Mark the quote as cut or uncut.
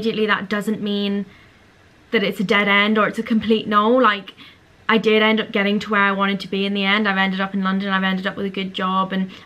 uncut